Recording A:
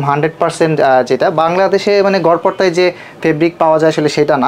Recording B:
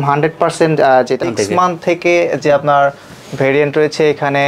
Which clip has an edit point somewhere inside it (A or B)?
B